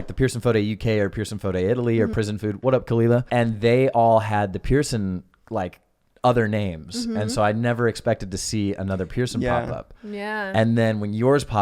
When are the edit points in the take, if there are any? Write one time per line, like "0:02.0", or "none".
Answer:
0:02.1
0:03.3